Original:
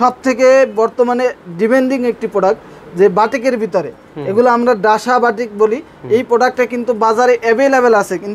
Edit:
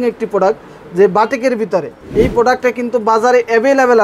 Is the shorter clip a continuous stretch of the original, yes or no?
no